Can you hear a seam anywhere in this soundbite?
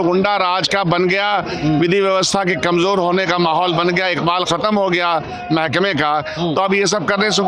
no; 0 cuts

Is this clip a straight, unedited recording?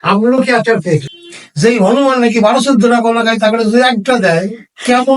no; 1 cut; at 1.0 s

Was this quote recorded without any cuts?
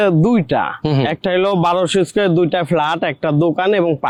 yes; 0 cuts

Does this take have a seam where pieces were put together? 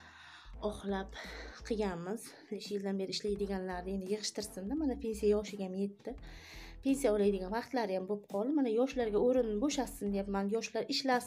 yes; 1 cut; at 2.6 s

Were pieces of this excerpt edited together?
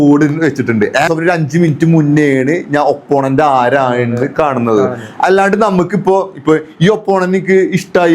yes; 1 cut; at 1.1 s

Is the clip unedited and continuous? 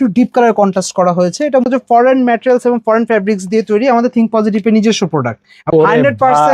no; 2 cuts; at 1.6 s, 5.7 s

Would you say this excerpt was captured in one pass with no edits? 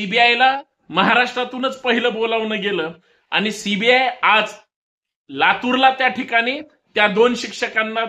no; 1 cut; at 5.2 s

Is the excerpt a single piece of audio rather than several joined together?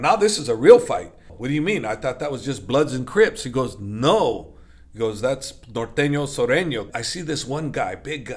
no; 2 cuts; at 1.3 s, 6.9 s

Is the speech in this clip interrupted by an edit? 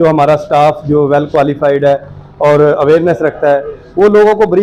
no; 0 cuts

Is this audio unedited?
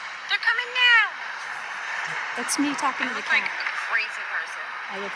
yes; 0 cuts

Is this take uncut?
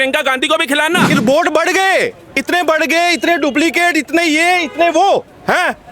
no; 1 cut; at 1.1 s

